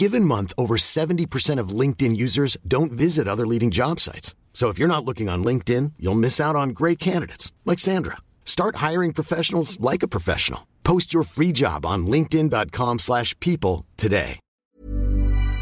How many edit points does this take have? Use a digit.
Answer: 1